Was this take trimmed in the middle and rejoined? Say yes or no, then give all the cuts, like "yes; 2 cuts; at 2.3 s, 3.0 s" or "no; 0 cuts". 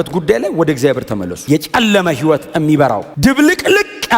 yes; 2 cuts; at 1.4 s, 3.1 s